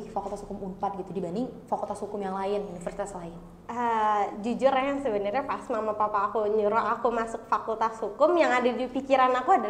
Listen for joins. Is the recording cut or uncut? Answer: uncut